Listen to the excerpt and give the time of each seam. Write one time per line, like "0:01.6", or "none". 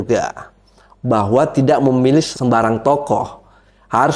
0:02.3